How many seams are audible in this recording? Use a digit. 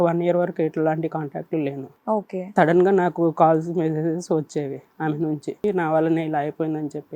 1